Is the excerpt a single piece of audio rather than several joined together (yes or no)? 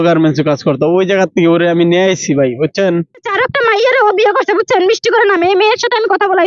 no